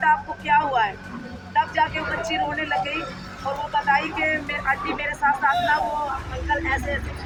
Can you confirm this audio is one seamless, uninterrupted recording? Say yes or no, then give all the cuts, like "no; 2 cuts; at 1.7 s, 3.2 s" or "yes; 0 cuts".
yes; 0 cuts